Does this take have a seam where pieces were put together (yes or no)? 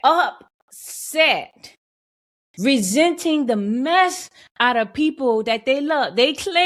no